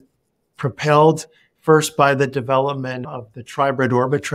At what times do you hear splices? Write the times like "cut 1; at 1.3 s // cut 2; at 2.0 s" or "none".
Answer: cut 1; at 3.1 s